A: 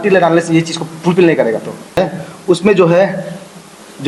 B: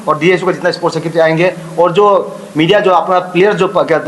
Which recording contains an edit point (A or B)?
A